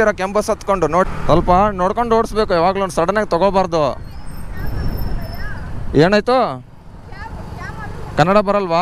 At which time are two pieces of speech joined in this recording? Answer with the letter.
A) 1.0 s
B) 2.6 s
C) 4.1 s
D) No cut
A